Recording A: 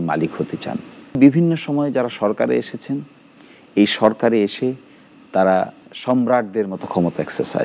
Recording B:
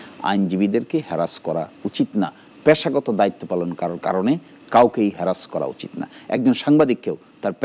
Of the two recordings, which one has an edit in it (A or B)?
A